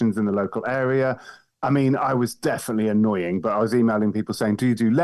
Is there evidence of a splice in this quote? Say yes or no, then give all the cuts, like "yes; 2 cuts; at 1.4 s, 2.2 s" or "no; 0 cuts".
no; 0 cuts